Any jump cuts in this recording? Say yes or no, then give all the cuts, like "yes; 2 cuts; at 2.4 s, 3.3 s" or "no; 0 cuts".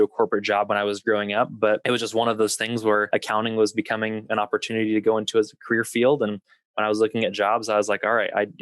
yes; 2 cuts; at 1.8 s, 3.1 s